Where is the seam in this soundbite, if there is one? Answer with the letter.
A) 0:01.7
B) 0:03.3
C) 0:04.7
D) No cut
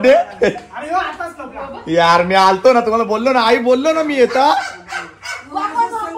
D